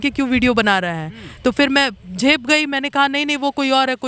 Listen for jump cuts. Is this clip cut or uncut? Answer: uncut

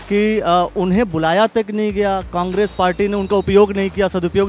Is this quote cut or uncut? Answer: uncut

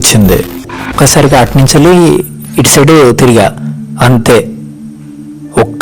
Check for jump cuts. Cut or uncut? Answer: cut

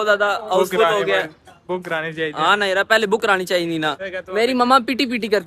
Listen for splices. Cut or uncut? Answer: cut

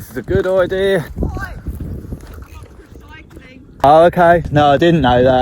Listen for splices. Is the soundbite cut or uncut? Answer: cut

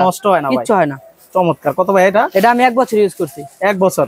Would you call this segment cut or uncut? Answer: uncut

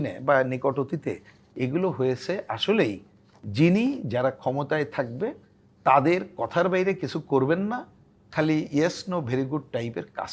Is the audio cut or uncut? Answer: uncut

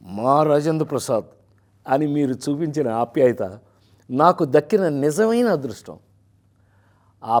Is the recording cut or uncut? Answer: uncut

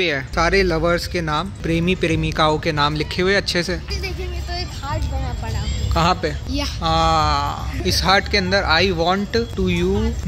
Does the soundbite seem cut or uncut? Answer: uncut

